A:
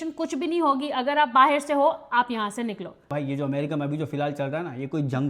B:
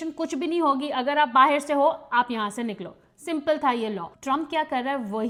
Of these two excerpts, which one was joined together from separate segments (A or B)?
A